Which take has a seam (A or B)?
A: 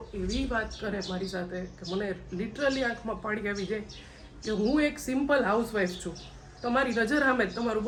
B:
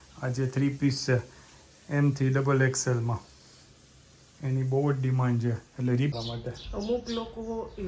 B